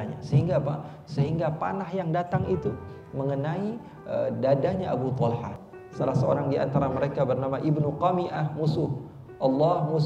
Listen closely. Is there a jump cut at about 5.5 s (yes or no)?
yes